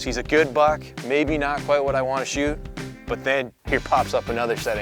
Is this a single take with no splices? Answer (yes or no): no